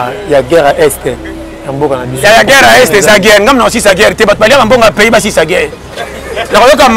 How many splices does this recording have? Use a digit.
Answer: 0